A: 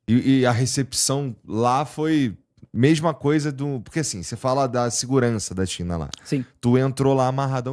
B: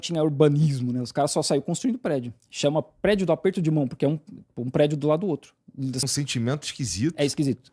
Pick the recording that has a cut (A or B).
B